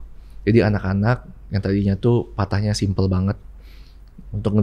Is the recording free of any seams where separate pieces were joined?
yes; 0 cuts

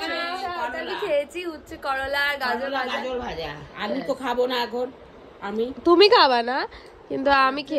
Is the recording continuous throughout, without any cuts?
yes; 0 cuts

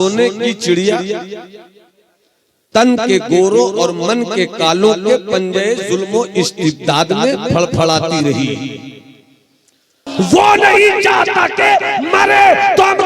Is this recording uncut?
no; 1 cut; at 10.1 s

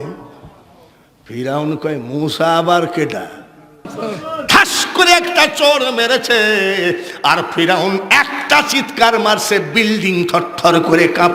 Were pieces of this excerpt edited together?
yes; 1 cut; at 3.8 s

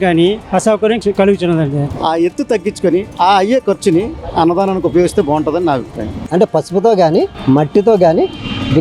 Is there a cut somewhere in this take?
yes; 3 cuts; at 1.0 s, 1.9 s, 6.2 s

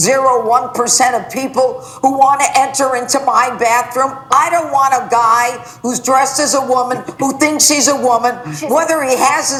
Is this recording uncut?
yes; 0 cuts

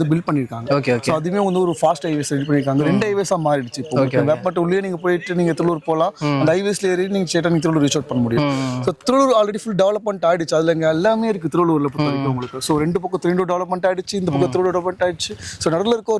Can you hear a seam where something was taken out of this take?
no; 0 cuts

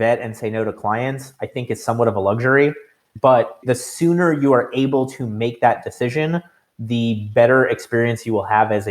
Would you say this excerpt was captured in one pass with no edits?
no; 1 cut; at 3.1 s

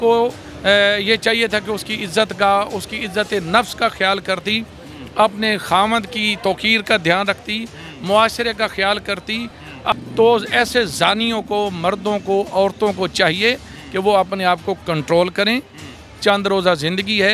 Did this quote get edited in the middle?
yes; 1 cut; at 9.9 s

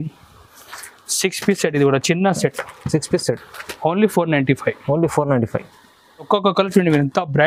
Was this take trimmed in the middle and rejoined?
yes; 1 cut; at 6.3 s

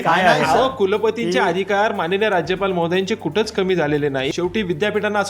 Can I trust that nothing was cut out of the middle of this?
no; 1 cut; at 4.3 s

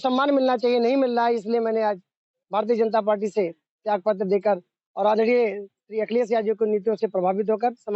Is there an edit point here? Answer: no; 0 cuts

